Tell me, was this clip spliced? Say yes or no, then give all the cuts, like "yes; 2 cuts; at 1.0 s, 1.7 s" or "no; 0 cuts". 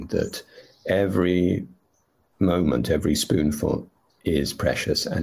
no; 0 cuts